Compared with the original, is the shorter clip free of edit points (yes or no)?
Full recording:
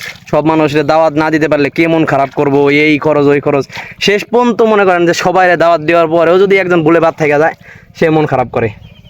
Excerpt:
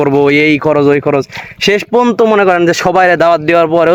yes